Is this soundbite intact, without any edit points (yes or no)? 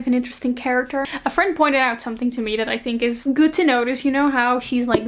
yes